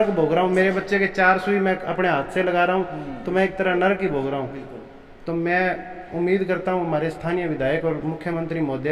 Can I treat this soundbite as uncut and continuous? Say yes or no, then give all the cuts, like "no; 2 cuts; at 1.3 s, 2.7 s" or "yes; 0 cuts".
yes; 0 cuts